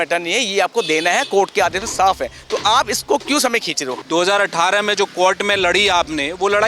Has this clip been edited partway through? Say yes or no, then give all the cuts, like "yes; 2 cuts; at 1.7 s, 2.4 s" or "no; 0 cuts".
yes; 1 cut; at 3.9 s